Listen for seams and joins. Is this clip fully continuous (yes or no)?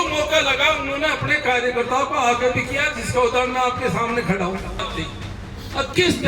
no